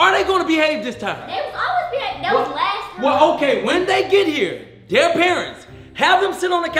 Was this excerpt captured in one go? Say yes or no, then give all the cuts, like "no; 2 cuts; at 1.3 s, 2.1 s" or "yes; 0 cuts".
yes; 0 cuts